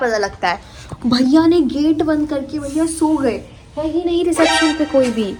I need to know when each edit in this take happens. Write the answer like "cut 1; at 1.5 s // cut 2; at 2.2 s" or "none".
none